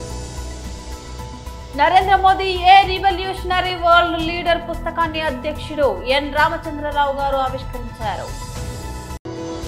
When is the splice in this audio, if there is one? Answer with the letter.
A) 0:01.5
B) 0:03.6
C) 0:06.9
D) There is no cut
A